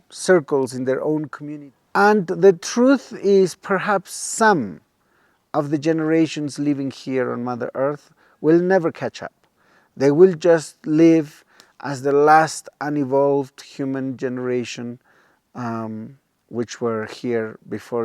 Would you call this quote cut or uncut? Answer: cut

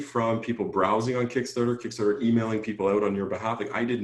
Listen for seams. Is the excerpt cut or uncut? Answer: uncut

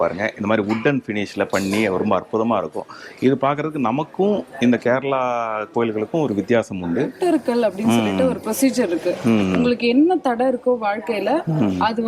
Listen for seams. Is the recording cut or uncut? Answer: cut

